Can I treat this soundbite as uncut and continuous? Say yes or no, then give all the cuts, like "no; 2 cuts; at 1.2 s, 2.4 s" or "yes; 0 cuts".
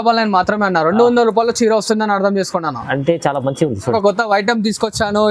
no; 1 cut; at 3.9 s